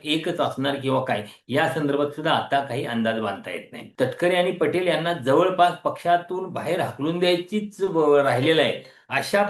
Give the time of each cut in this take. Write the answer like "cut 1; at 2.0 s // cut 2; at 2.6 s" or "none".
cut 1; at 3.8 s